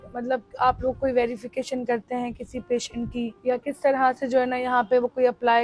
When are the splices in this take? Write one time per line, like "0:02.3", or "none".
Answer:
0:03.4